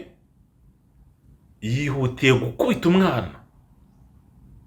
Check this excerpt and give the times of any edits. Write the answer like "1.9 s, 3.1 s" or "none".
none